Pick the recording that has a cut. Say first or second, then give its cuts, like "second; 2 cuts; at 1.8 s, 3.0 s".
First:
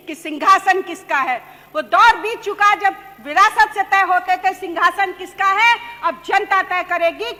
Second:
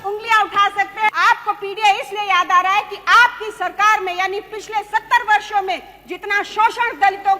second; 1 cut; at 1.1 s